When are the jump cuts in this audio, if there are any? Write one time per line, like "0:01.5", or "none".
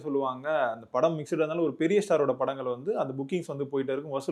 none